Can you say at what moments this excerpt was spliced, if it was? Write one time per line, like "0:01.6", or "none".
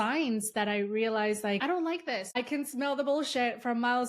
0:01.8

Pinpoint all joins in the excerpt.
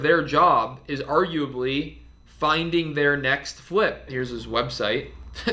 none

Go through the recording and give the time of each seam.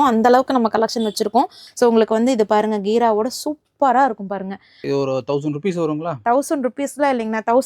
0:01.6
0:04.8

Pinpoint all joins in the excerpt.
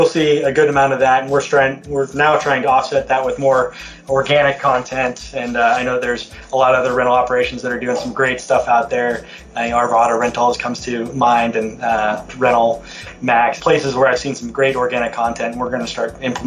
0:13.6

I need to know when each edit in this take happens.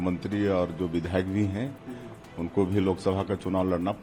none

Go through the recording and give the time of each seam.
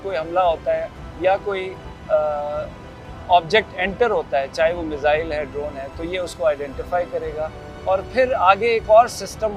none

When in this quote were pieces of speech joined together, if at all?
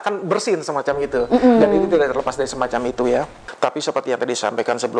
0:03.4

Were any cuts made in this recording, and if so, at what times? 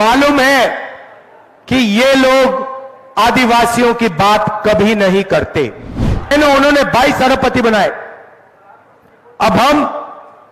0:06.3

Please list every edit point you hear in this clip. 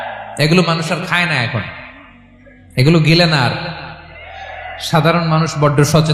none

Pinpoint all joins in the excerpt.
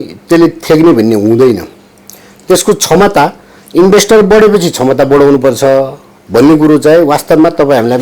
none

